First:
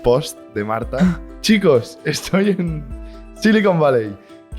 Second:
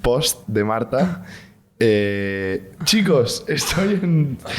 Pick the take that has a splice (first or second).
first